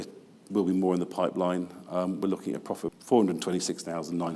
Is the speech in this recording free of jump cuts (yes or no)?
no